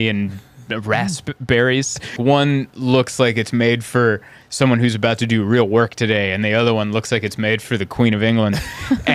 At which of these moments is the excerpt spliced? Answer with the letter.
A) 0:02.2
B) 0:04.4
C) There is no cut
A